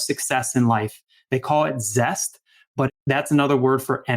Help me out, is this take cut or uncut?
cut